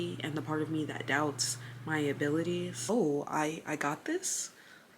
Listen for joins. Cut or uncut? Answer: cut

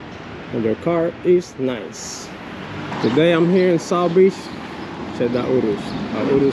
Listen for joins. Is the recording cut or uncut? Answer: cut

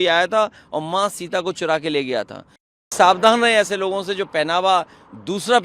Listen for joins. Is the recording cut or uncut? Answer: cut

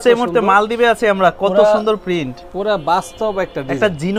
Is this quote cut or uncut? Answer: uncut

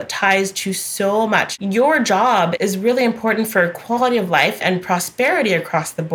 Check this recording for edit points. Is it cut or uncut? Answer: cut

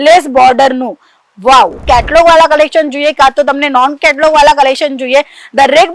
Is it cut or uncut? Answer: cut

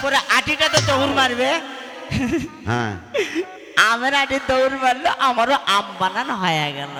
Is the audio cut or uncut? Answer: uncut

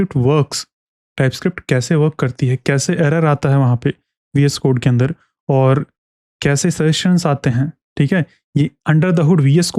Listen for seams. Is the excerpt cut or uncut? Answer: uncut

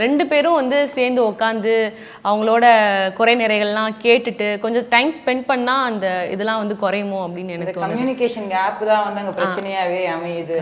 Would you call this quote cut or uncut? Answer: uncut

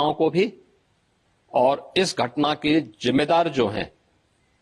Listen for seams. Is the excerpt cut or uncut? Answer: uncut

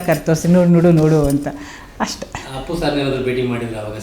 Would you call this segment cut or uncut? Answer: uncut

